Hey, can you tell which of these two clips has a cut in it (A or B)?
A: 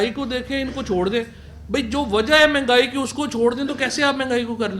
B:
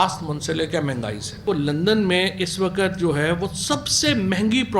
B